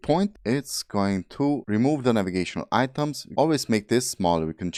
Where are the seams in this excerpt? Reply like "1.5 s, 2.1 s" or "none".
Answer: none